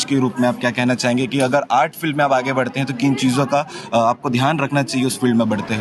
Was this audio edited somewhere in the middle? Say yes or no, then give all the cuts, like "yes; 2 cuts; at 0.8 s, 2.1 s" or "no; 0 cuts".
no; 0 cuts